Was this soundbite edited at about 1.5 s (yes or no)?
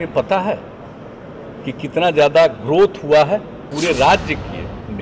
no